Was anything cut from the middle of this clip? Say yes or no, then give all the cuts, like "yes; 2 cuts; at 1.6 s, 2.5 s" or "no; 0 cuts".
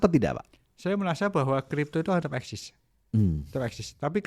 no; 0 cuts